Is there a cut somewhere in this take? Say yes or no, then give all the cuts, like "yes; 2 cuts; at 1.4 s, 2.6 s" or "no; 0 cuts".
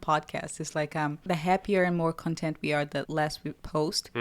yes; 2 cuts; at 1.2 s, 3.2 s